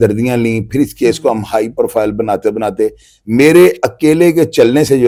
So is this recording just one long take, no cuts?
yes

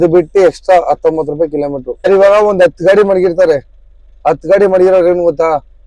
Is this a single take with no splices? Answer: no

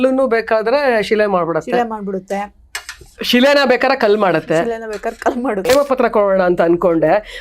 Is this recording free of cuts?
no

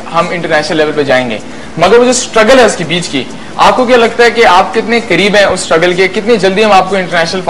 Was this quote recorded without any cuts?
no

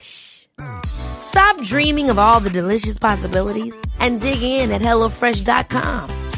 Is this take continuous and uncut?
yes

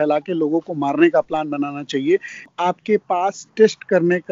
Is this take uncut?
no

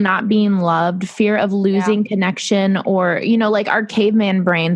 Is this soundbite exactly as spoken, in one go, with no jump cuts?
yes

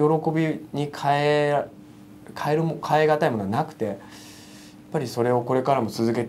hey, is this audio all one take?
yes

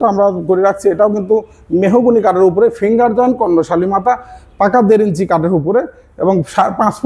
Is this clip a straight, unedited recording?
yes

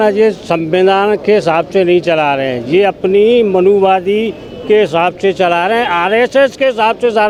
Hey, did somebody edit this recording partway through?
no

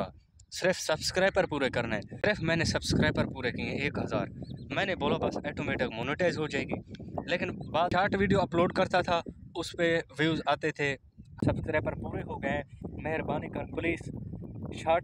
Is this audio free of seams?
no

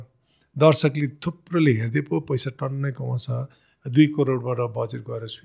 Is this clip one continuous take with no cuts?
yes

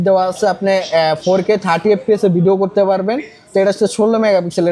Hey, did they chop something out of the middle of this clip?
no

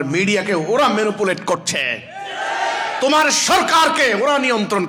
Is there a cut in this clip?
no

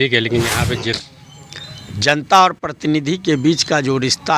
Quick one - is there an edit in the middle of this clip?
yes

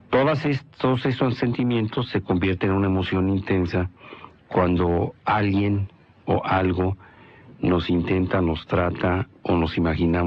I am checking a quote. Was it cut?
no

